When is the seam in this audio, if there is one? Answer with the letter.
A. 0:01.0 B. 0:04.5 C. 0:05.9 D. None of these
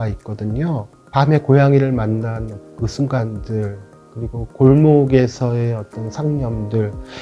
A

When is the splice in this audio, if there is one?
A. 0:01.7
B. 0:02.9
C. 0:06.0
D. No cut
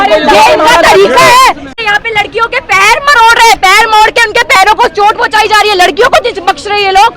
A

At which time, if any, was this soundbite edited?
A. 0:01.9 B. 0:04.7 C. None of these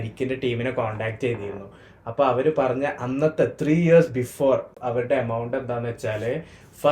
B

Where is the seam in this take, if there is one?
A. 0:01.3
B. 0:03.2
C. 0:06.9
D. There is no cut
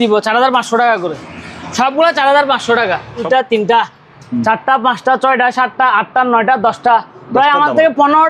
B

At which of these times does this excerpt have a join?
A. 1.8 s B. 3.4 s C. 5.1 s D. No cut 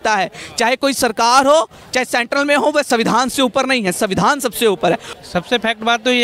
C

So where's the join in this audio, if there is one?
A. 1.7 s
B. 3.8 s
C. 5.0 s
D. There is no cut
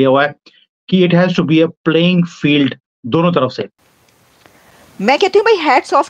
B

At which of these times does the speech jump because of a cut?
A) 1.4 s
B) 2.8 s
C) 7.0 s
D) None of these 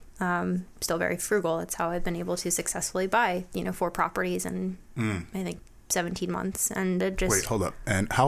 C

